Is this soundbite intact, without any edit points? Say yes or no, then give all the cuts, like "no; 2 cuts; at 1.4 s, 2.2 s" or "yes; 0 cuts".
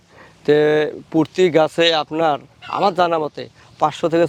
yes; 0 cuts